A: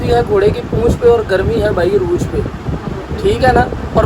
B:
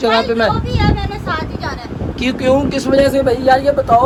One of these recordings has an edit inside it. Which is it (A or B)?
A